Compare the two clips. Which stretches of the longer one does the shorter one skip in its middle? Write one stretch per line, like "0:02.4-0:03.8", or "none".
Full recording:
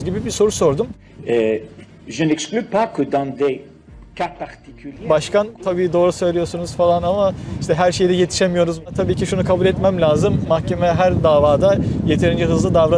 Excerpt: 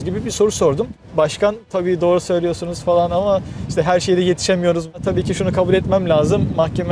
0:01.0-0:04.9